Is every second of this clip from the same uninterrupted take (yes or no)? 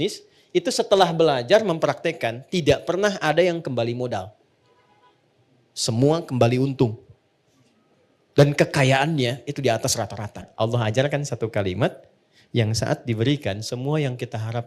no